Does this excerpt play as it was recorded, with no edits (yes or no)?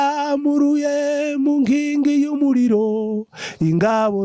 yes